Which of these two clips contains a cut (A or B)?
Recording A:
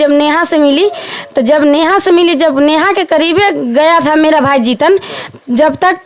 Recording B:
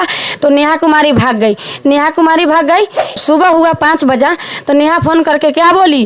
B